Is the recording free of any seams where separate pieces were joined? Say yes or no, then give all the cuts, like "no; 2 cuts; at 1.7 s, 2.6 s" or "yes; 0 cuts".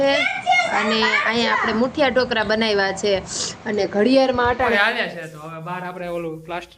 no; 1 cut; at 4.8 s